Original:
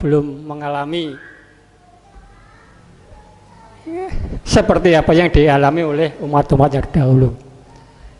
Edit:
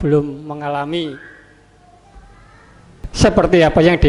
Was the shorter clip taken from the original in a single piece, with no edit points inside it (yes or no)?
no